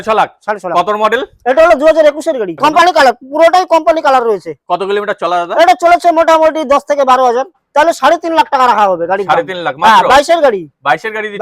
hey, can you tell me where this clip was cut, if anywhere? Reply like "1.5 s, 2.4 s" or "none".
2.5 s, 7.6 s